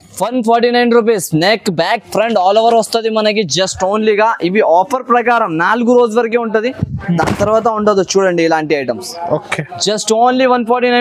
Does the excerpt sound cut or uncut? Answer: uncut